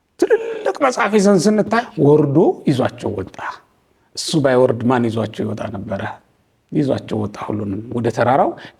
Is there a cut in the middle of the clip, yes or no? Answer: yes